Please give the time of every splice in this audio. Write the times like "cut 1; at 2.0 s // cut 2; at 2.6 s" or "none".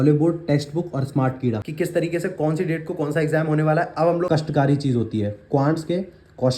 cut 1; at 1.6 s // cut 2; at 4.3 s